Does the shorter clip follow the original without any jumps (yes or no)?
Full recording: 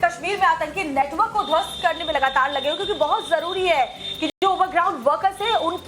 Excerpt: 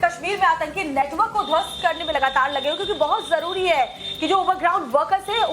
no